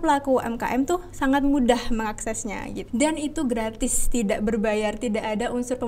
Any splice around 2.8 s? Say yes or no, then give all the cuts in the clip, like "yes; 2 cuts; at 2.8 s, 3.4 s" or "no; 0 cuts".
yes; 1 cut; at 2.8 s